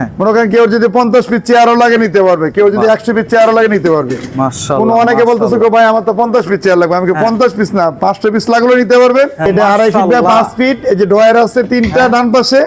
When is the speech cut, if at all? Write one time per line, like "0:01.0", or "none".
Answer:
0:09.5